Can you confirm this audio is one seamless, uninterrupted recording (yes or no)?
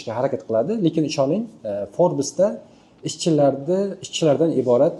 yes